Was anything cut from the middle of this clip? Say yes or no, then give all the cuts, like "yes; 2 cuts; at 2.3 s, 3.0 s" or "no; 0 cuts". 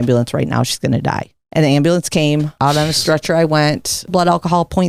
yes; 3 cuts; at 1.3 s, 2.5 s, 4.1 s